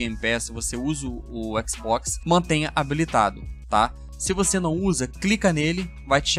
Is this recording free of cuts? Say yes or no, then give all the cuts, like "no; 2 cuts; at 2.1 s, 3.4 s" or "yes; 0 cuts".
yes; 0 cuts